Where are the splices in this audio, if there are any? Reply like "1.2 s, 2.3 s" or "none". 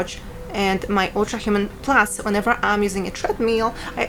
none